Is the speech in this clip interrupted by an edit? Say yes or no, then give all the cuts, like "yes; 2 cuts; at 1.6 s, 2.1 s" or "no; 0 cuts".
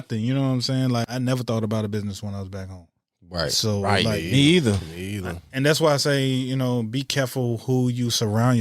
yes; 1 cut; at 1.0 s